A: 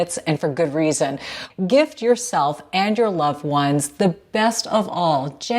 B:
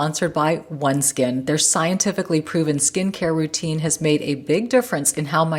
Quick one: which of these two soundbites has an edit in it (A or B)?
A